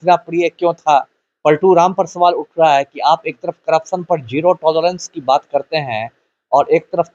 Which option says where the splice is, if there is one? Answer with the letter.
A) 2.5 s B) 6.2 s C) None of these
C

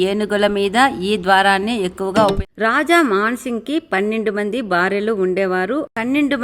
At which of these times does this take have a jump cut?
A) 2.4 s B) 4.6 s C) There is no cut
A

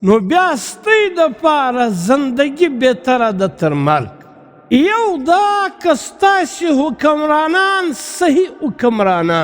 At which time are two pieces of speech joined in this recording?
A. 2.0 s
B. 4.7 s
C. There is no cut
B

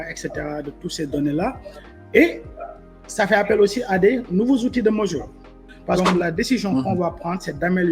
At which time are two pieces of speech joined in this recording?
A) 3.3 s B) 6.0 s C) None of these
B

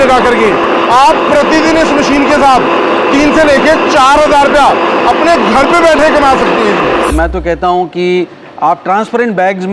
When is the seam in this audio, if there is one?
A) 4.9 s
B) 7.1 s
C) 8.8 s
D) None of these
B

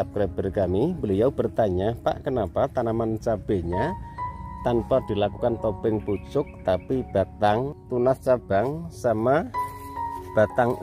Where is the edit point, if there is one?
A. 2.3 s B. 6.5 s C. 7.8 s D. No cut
C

